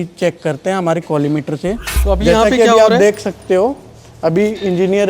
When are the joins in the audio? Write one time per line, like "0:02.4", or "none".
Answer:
0:01.9